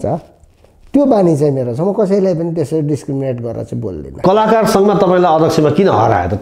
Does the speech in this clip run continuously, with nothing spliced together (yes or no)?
no